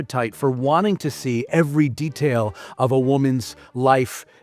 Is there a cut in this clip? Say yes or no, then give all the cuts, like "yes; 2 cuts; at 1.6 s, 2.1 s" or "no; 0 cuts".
no; 0 cuts